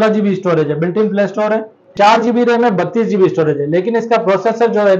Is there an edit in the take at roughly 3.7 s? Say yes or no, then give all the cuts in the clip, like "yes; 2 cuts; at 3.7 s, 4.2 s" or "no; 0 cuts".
no; 1 cut; at 1.8 s